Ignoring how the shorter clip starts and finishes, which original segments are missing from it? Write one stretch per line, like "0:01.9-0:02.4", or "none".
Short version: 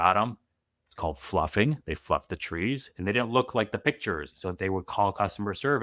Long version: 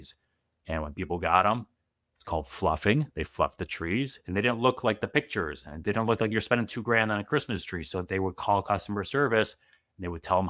0:05.6-0:07.8